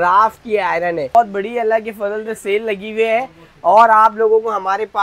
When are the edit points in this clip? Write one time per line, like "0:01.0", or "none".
0:01.1